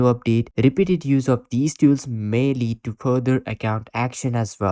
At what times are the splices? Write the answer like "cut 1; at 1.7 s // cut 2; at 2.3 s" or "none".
none